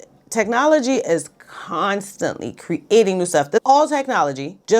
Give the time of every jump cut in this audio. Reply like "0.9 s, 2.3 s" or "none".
3.6 s